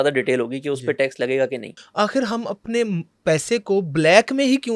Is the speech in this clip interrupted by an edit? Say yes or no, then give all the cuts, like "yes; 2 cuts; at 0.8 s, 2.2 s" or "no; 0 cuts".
yes; 1 cut; at 1.8 s